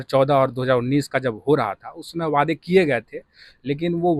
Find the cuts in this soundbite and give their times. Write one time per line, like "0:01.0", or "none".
none